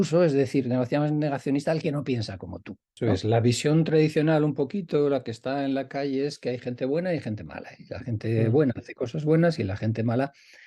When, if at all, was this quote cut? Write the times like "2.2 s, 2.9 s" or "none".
2.9 s